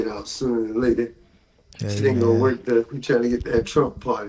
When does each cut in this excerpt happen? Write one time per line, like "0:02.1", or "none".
none